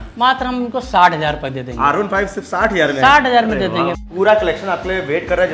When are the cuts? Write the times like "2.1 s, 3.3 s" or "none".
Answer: 4.0 s